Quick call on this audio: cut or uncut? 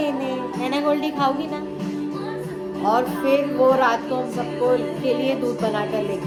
uncut